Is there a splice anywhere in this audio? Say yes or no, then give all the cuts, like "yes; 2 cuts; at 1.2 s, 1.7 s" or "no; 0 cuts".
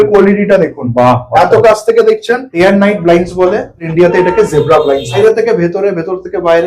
yes; 3 cuts; at 2.5 s, 3.9 s, 5.2 s